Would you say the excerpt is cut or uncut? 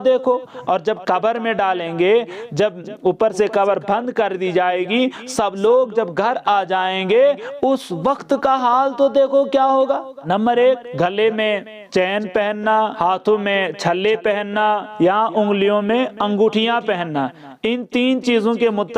cut